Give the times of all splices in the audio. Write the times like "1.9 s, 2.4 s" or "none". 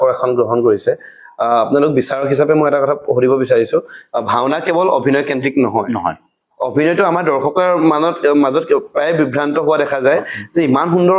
none